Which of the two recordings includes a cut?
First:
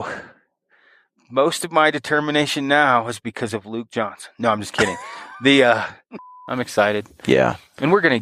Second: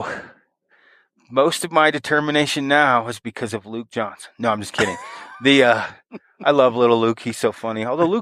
first; 1 cut; at 6.3 s

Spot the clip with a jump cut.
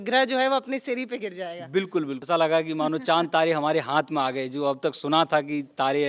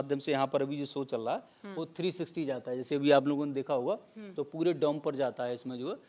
first; 1 cut; at 2.2 s

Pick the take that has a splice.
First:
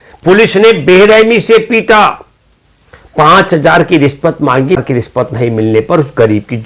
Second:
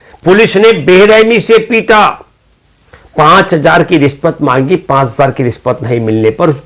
first; 1 cut; at 4.8 s

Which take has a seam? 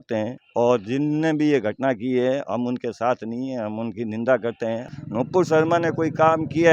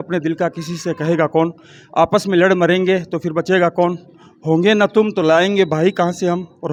first; 1 cut; at 4.8 s

